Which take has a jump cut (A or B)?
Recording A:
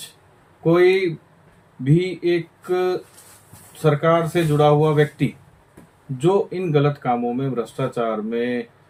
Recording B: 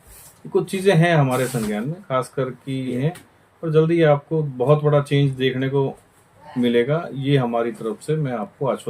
B